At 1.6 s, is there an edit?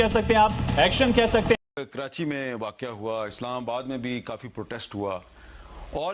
yes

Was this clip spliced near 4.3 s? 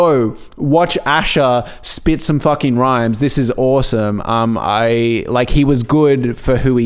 no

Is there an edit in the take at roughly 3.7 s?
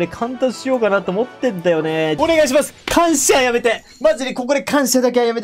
no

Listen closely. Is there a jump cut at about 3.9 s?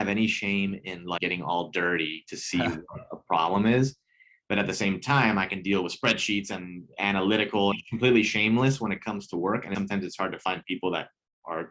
no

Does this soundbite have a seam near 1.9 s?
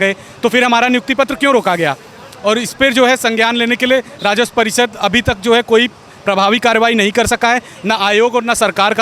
no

